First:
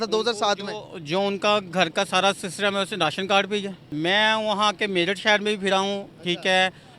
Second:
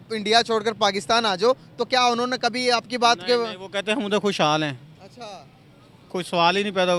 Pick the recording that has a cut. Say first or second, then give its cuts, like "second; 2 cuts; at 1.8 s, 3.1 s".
first; 1 cut; at 3.8 s